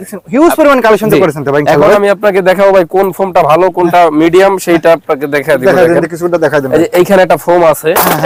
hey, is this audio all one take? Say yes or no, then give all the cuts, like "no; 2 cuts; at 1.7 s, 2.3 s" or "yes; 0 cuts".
yes; 0 cuts